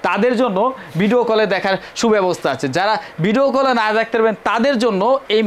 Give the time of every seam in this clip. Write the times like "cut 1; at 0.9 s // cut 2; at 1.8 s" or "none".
none